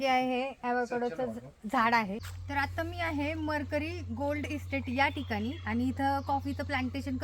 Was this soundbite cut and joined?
yes; 1 cut; at 2.3 s

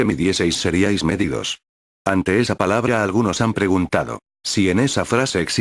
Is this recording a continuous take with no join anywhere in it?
no; 1 cut; at 0.9 s

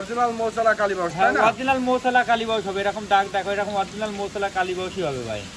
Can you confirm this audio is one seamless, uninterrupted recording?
yes; 0 cuts

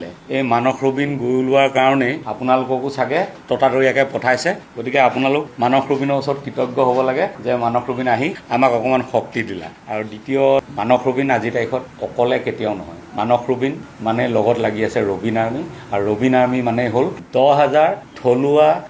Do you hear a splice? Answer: yes; 1 cut; at 10.7 s

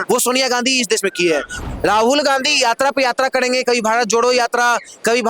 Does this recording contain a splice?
yes; 1 cut; at 1.6 s

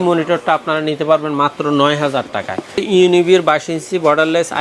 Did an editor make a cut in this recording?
yes; 1 cut; at 2.8 s

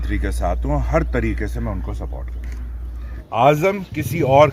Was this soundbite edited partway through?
yes; 1 cut; at 3.2 s

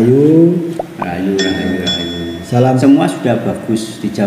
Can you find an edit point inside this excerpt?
yes; 1 cut; at 2.8 s

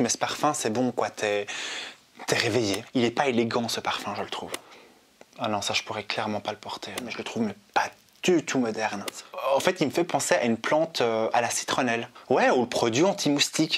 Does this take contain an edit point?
yes; 5 cuts; at 2.8 s, 4.6 s, 7.2 s, 9.2 s, 12.1 s

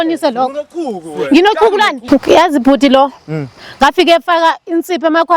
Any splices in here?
yes; 1 cut; at 2.0 s

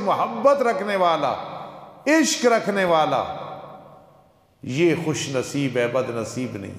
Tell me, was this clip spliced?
no; 0 cuts

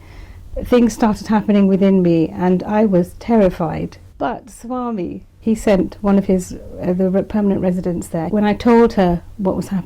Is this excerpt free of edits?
no; 3 cuts; at 4.0 s, 5.2 s, 8.2 s

